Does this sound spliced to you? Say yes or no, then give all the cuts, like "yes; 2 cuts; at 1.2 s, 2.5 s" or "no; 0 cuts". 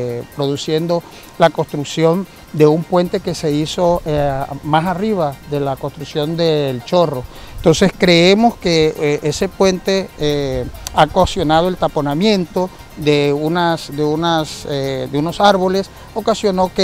no; 0 cuts